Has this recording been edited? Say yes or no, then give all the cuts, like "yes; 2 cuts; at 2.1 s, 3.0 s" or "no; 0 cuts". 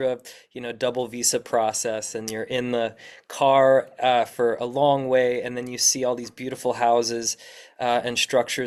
no; 0 cuts